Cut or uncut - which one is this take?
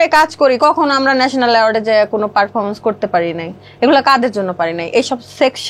uncut